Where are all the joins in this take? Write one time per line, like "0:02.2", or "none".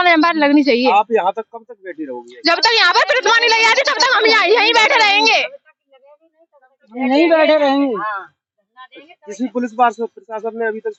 none